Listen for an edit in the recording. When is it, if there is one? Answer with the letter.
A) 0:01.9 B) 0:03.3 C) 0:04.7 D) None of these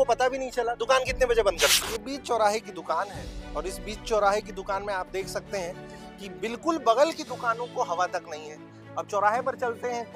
A